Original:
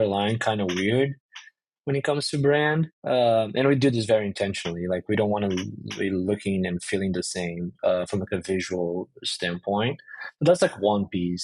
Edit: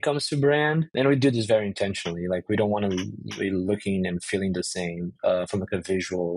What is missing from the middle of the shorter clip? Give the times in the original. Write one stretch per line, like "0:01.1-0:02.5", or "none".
0:02.9-0:03.5